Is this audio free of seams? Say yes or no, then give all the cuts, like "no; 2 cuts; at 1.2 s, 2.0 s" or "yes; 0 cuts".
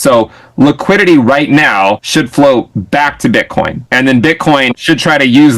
no; 3 cuts; at 2.0 s, 3.8 s, 4.8 s